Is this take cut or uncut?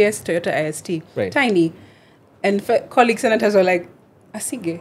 uncut